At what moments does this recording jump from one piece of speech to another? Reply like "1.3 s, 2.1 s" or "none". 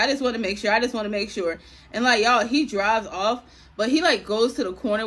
none

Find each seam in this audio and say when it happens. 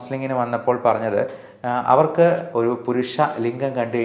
2.5 s

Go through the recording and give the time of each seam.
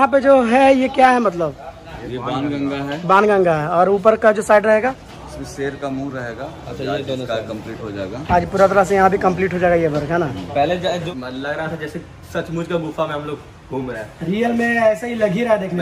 11.1 s

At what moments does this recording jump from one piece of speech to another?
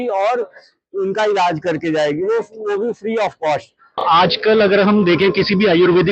4.0 s

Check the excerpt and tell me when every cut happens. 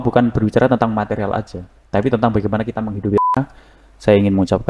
3.3 s

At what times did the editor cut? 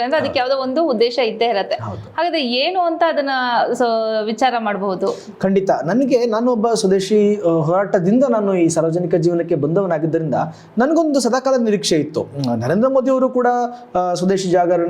none

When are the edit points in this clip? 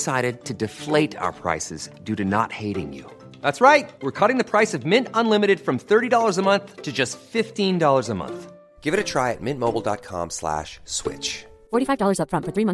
none

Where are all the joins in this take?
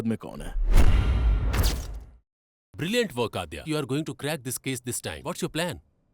2.3 s, 3.6 s

